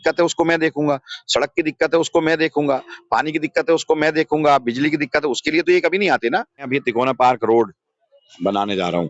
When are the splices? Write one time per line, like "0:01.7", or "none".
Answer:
0:06.6

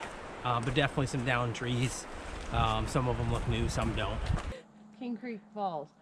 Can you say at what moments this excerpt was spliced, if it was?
0:04.5

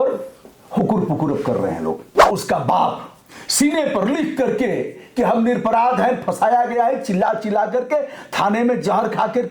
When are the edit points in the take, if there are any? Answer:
0:02.3

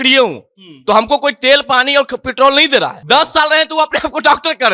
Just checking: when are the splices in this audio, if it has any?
0:03.0

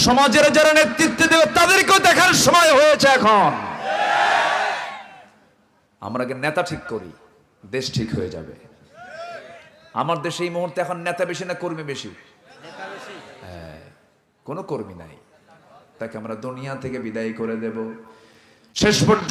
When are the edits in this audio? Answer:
0:16.0

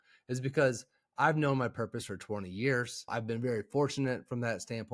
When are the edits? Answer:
0:03.1

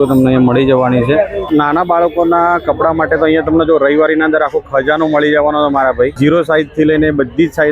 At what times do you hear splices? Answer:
0:01.4
0:06.1

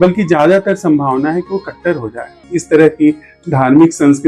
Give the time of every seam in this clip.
0:02.4

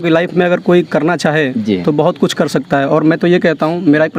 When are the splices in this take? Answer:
none

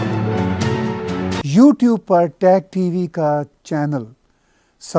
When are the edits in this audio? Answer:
0:01.2

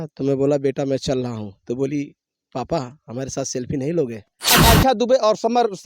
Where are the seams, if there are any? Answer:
0:04.6

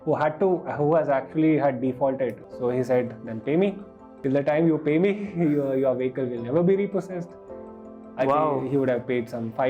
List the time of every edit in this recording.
0:02.4
0:04.1

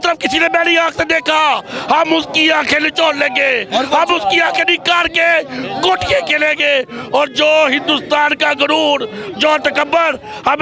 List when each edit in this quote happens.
none

